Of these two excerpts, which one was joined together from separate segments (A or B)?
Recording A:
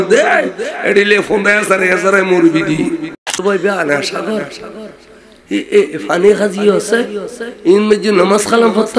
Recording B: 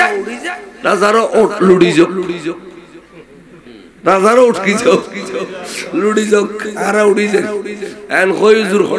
A